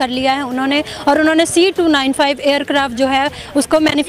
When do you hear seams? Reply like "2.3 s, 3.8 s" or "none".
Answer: none